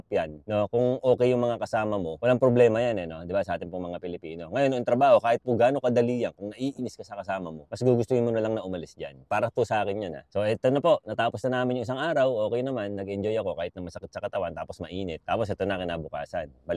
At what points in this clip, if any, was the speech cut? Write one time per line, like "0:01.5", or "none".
none